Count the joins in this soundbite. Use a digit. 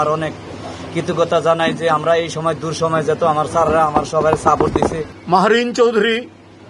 1